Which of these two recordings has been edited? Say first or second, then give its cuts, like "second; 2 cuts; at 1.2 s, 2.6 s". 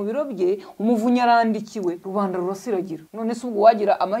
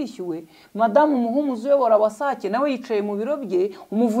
first; 2 cuts; at 2.0 s, 3.0 s